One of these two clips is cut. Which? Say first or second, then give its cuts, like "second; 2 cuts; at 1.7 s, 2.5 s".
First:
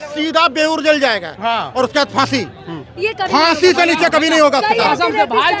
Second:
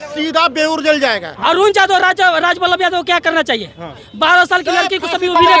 second; 2 cuts; at 1.4 s, 4.0 s